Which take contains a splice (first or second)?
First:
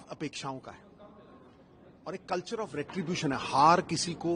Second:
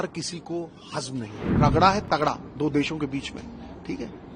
second